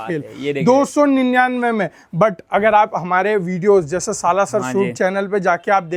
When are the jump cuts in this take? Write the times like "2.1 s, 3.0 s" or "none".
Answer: none